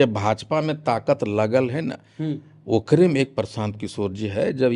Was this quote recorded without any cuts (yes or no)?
yes